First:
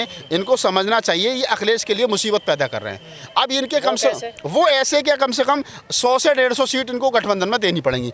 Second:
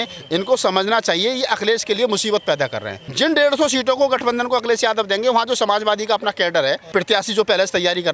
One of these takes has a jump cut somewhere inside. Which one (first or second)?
second